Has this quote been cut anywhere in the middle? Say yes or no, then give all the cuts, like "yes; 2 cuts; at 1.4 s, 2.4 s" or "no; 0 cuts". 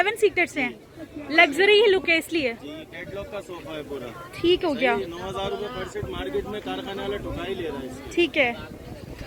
no; 0 cuts